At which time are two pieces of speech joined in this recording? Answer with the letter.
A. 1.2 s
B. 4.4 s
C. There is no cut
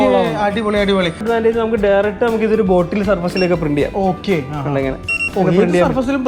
A